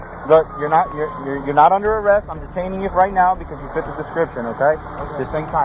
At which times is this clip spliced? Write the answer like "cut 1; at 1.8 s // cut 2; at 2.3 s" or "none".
none